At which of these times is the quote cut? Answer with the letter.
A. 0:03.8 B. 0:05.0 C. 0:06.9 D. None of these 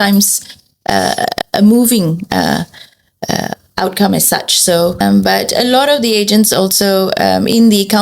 B